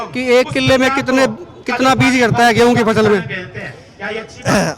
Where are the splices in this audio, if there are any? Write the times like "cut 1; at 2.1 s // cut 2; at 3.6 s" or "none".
none

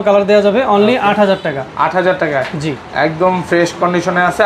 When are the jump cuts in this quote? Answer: none

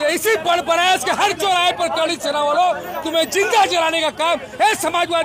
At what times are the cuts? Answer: none

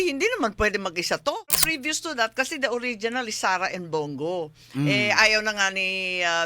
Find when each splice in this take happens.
cut 1; at 1.6 s

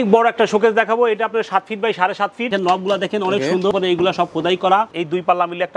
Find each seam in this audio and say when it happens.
cut 1; at 2.5 s // cut 2; at 3.7 s // cut 3; at 4.9 s

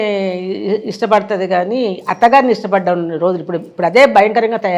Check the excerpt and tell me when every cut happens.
none

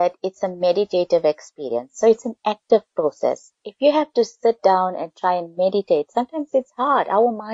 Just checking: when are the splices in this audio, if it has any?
none

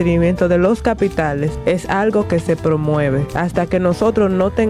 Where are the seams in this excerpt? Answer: cut 1; at 1.5 s // cut 2; at 3.3 s

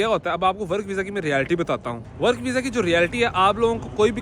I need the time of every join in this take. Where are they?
none

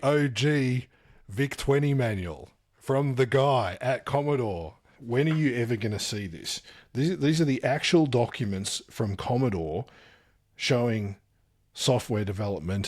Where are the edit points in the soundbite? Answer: cut 1; at 4.9 s

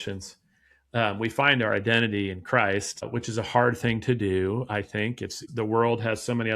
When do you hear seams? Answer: cut 1; at 3.1 s // cut 2; at 5.4 s

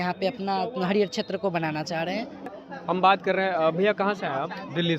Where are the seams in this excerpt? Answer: cut 1; at 2.5 s

